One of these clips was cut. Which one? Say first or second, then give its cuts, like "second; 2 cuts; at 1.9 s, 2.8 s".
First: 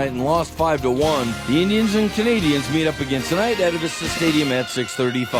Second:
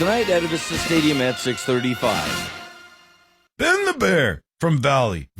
second; 1 cut; at 3.4 s